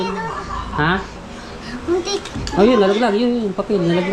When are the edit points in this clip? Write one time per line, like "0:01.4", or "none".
none